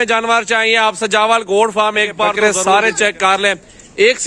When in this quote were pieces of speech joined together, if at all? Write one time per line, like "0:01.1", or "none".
0:02.4